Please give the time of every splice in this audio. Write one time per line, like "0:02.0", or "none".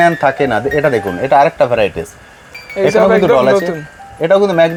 none